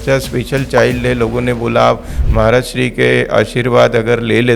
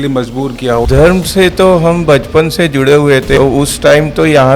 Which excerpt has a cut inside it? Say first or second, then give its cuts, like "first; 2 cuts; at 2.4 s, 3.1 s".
second; 2 cuts; at 0.8 s, 3.4 s